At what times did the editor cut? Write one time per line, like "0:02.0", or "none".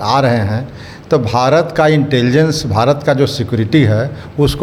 none